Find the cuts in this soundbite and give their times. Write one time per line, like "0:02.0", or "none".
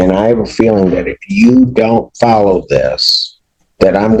none